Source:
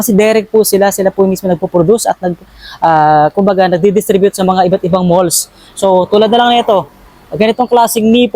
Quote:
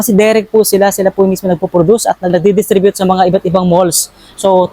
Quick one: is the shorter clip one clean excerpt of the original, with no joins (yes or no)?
no